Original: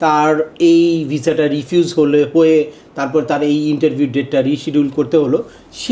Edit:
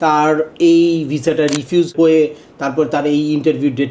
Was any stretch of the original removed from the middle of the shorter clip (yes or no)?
yes